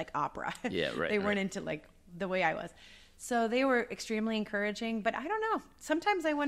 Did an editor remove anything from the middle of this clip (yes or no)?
no